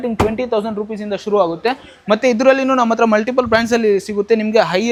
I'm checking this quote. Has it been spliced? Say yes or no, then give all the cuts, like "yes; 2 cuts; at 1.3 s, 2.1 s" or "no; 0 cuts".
no; 0 cuts